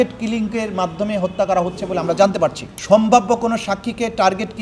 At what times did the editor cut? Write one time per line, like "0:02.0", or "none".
0:02.7